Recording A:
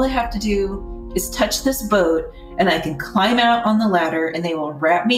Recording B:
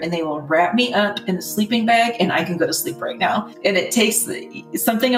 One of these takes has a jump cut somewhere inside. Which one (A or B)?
B